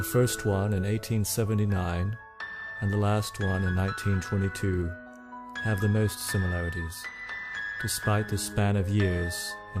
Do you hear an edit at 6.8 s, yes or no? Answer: yes